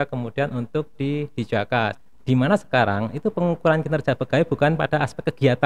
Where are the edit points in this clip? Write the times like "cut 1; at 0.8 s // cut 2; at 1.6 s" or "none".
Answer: cut 1; at 2.0 s